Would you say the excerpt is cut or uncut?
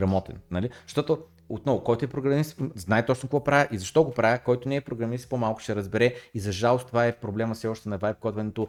uncut